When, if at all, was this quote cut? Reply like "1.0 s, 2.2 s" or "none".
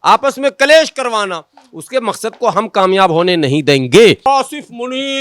4.3 s